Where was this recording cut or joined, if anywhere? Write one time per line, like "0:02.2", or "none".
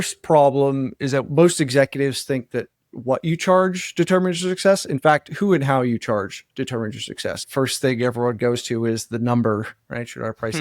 0:01.2
0:07.4